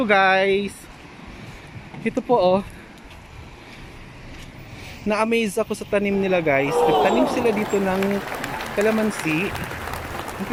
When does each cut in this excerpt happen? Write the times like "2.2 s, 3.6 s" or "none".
none